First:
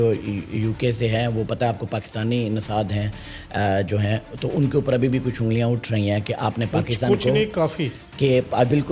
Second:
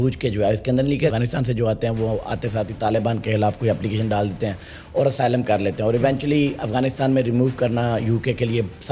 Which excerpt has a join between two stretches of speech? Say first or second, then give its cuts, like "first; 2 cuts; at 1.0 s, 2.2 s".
second; 1 cut; at 1.1 s